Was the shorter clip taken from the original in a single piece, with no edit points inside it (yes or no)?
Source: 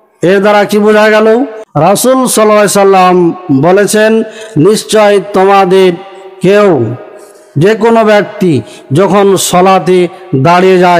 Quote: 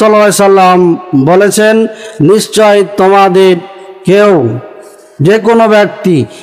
yes